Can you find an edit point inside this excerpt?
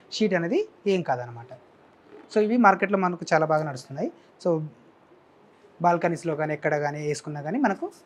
no; 0 cuts

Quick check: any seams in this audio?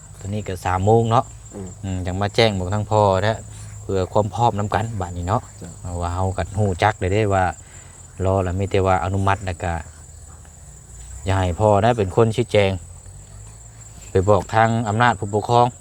no; 0 cuts

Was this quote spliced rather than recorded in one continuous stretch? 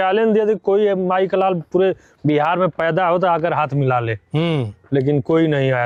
no; 0 cuts

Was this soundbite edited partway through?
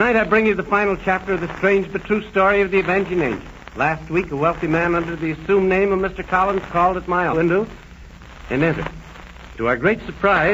no; 0 cuts

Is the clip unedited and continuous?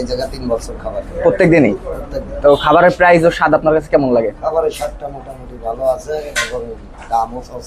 yes; 0 cuts

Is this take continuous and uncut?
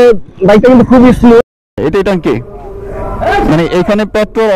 no; 1 cut; at 1.6 s

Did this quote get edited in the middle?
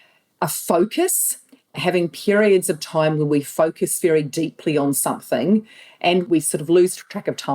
yes; 1 cut; at 6.2 s

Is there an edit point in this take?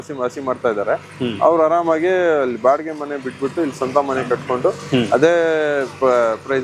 no; 0 cuts

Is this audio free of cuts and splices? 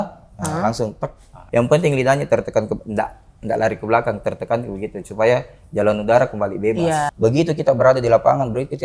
no; 2 cuts; at 1.4 s, 7.1 s

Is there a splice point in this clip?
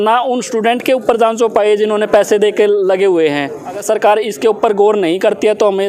yes; 1 cut; at 3.8 s

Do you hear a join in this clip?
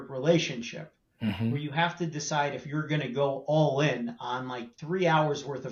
no; 0 cuts

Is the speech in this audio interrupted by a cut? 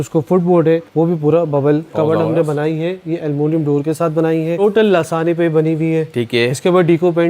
yes; 3 cuts; at 0.9 s, 1.9 s, 4.6 s

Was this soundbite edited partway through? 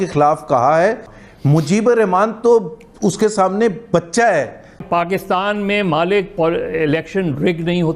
yes; 2 cuts; at 1.2 s, 4.8 s

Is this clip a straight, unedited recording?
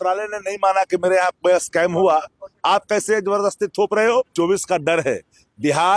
no; 1 cut; at 4.3 s

